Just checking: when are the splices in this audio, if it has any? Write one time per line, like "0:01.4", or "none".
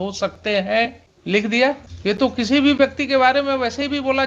0:01.1
0:01.9